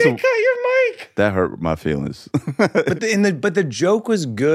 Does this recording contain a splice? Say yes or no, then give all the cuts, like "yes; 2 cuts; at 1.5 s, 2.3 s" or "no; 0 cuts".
yes; 1 cut; at 2.9 s